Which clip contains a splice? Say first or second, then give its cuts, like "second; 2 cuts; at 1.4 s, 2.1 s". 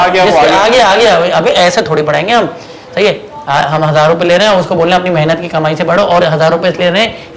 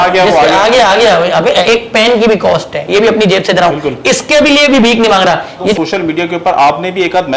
second; 2 cuts; at 1.6 s, 5.7 s